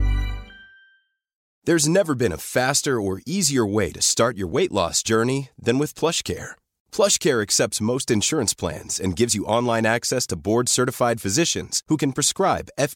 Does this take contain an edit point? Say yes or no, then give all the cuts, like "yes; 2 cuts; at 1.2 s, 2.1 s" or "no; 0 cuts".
yes; 1 cut; at 1.5 s